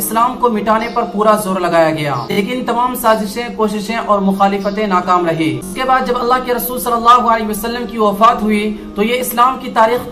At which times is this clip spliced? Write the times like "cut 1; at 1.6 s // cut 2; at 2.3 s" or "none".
cut 1; at 2.3 s // cut 2; at 5.7 s